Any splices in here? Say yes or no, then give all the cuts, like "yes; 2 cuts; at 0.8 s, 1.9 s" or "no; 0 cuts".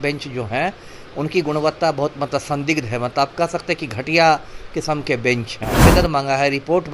yes; 1 cut; at 5.9 s